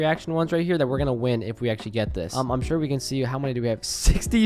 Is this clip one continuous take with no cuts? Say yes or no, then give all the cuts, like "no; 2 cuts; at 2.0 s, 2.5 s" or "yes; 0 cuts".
no; 1 cut; at 2.2 s